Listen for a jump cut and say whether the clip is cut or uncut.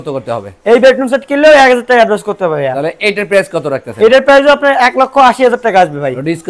uncut